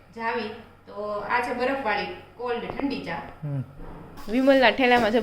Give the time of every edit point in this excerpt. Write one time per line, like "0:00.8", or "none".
0:04.2